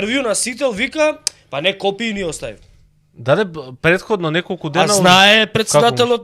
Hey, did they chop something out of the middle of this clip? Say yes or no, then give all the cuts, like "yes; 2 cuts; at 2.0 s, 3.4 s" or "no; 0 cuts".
no; 0 cuts